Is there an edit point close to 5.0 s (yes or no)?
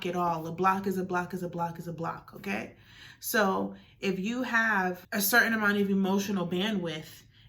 yes